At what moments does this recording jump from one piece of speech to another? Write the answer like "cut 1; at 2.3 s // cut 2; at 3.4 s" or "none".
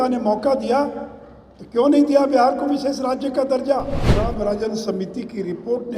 cut 1; at 4.3 s